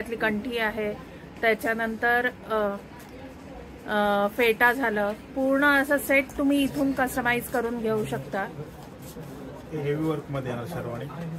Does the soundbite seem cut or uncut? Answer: uncut